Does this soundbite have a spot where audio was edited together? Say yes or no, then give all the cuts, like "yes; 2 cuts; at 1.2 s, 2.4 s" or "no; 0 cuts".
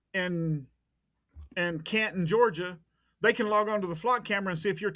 no; 0 cuts